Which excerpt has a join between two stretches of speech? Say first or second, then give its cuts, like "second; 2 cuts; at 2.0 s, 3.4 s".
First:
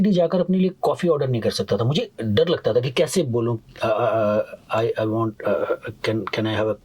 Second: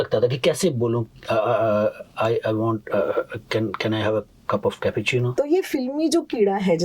second; 1 cut; at 5.3 s